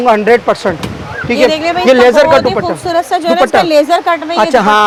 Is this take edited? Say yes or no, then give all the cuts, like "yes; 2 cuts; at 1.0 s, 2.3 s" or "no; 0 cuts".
no; 0 cuts